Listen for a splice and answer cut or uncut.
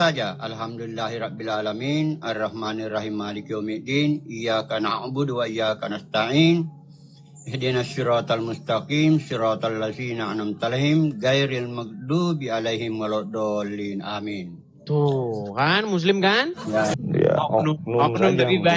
cut